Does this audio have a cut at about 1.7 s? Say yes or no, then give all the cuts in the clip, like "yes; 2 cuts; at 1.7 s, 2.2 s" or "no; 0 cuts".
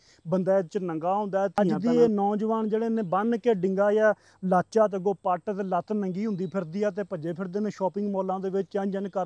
yes; 1 cut; at 1.7 s